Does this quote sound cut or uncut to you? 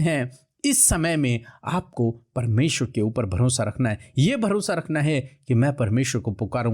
uncut